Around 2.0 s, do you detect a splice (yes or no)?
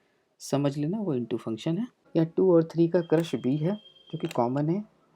yes